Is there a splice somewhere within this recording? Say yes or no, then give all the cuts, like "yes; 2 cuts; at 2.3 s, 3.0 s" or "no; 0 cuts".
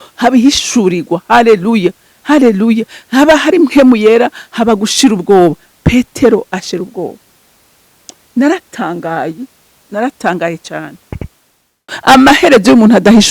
yes; 1 cut; at 11.9 s